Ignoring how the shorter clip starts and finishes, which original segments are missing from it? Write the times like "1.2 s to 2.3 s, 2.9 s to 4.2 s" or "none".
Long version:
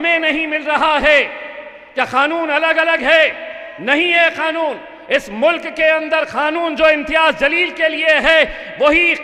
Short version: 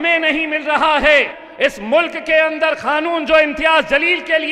1.4 s to 4.9 s